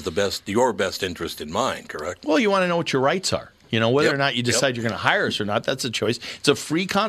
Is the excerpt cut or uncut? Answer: uncut